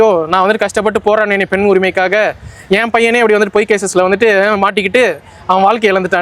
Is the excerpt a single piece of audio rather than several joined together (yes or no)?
yes